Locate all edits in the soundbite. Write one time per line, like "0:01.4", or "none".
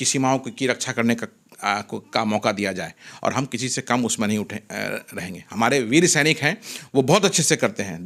none

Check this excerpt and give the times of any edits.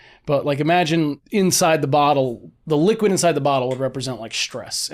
0:01.2

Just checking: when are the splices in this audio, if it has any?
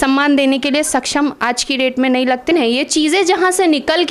0:02.5

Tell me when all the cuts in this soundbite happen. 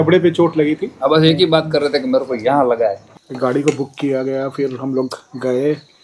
0:03.0

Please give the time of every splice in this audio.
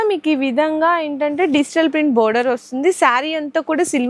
none

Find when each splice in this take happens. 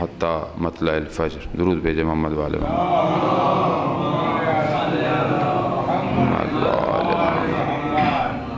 none

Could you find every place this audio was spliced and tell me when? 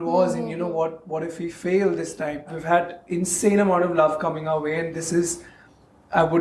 0:02.5

